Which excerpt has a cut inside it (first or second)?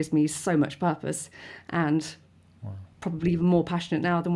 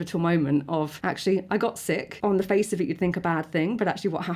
second